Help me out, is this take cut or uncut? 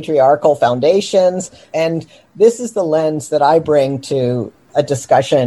cut